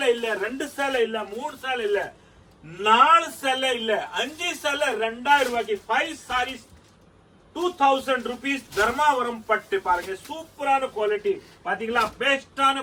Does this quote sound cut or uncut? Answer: uncut